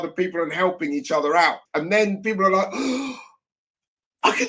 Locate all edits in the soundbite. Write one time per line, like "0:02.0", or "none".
0:01.6